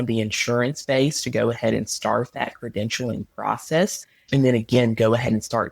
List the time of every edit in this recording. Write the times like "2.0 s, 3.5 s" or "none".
4.1 s

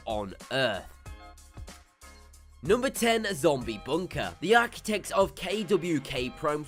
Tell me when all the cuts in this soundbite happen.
none

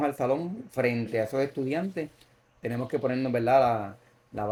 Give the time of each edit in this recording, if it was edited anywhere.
none

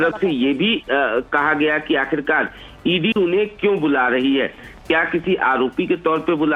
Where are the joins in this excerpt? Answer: none

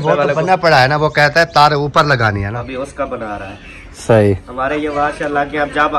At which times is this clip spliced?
2.5 s

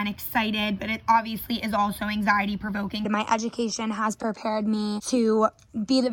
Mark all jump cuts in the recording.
3.1 s

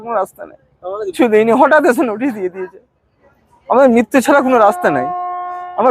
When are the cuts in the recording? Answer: 1.1 s

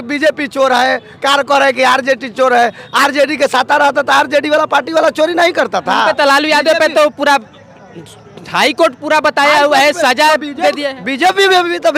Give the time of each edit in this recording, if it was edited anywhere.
none

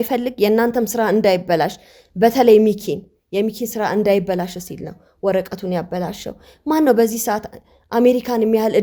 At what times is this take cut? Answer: none

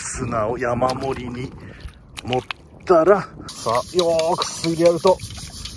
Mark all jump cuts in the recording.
3.6 s

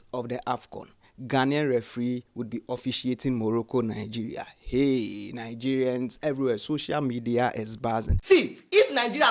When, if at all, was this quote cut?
8.1 s

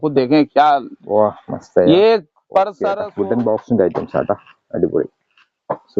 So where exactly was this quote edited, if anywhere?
3.0 s

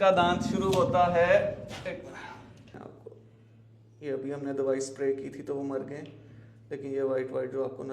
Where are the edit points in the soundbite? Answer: 2.7 s

